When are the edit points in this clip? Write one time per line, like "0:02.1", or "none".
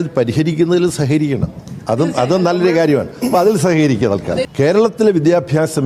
0:04.4